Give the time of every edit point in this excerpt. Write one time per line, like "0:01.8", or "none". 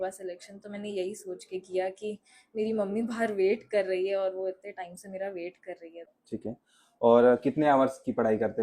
0:06.2